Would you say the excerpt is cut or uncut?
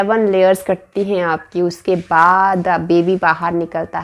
uncut